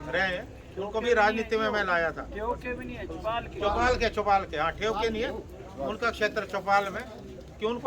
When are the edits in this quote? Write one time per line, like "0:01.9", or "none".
none